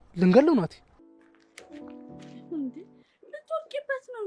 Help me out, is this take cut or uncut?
cut